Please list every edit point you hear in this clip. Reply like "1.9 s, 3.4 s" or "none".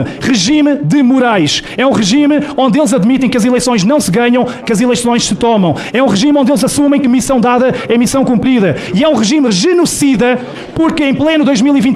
none

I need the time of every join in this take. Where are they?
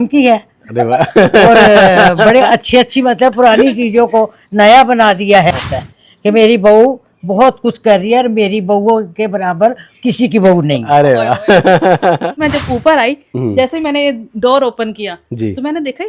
5.6 s, 12.4 s

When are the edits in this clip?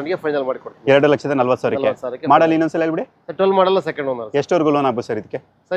none

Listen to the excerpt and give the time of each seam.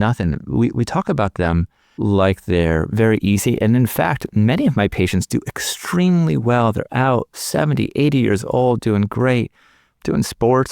1.8 s

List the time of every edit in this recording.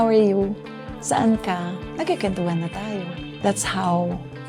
1.8 s, 3.2 s

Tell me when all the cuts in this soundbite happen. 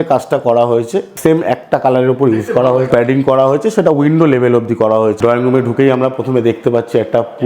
1.1 s, 2.9 s, 5.2 s

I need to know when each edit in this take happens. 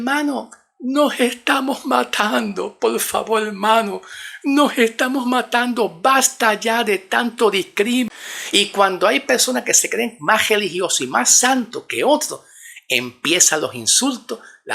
8.2 s

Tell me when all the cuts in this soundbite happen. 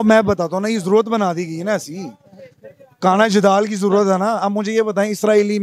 none

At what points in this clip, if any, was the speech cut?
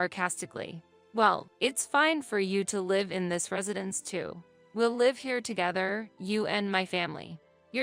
0.9 s

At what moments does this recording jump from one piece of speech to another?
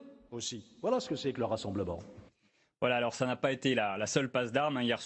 2.3 s

